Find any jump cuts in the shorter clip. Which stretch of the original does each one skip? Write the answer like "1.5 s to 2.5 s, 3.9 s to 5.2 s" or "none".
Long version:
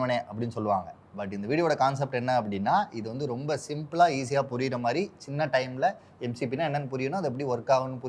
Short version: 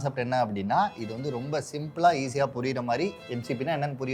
5.2 s to 6.2 s

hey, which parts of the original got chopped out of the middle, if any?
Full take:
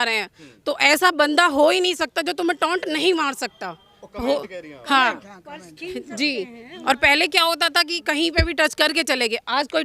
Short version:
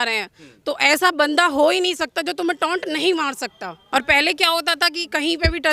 3.7 s to 6.7 s

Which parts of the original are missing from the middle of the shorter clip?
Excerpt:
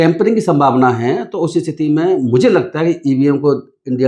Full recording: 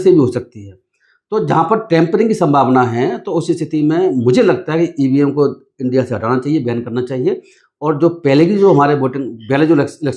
none

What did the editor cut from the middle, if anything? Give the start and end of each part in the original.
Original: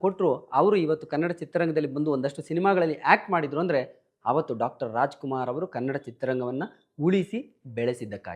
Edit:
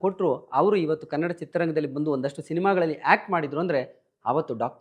none

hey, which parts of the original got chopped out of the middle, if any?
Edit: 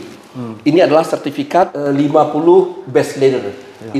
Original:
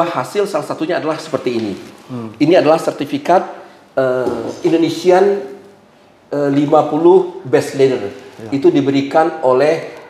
3.5 s to 6.3 s

